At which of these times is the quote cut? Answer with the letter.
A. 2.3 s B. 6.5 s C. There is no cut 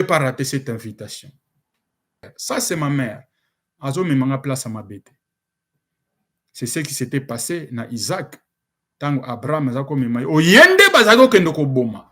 A